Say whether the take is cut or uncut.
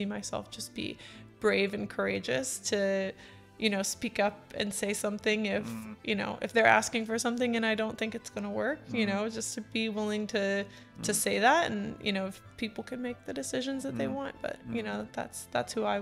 uncut